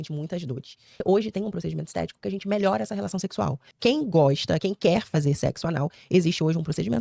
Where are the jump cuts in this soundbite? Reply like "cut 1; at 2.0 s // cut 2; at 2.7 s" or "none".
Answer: cut 1; at 1.0 s // cut 2; at 3.6 s